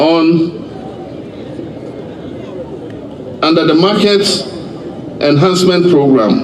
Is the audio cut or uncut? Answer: uncut